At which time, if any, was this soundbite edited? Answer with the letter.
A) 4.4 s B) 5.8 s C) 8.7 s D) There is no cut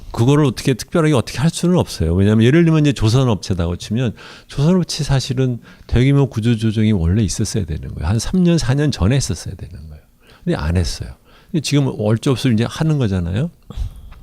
B